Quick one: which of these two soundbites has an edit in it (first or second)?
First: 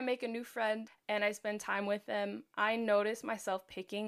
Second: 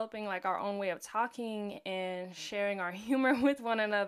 first